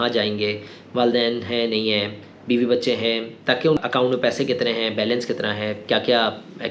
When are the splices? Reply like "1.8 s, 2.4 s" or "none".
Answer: 3.8 s